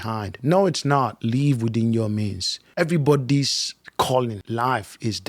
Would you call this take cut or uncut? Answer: cut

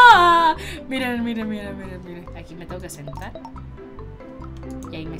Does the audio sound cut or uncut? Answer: uncut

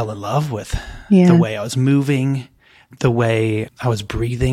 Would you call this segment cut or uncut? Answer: cut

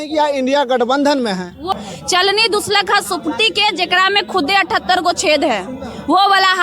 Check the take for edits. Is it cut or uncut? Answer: cut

